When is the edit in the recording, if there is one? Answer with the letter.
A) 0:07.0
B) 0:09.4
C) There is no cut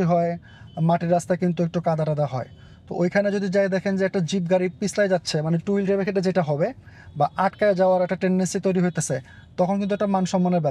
C